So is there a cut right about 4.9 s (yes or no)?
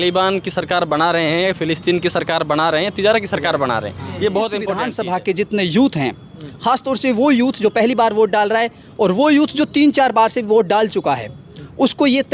yes